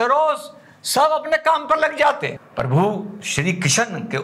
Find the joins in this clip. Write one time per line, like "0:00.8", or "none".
0:02.4